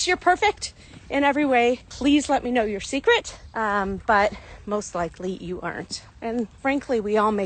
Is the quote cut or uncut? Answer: uncut